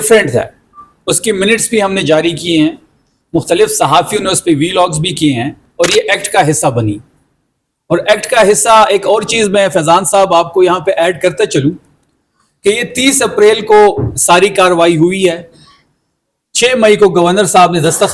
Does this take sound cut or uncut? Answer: cut